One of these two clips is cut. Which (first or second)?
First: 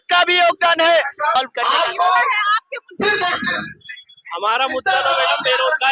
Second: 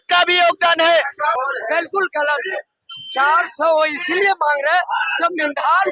second